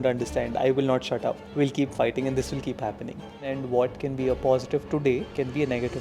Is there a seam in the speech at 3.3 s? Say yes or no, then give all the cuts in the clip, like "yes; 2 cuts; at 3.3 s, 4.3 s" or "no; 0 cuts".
yes; 1 cut; at 3.3 s